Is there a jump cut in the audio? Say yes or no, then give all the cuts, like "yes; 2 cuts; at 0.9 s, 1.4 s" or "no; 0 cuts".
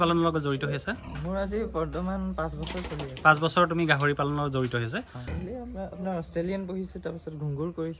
yes; 1 cut; at 5.1 s